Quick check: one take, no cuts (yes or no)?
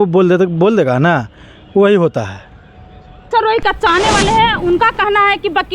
no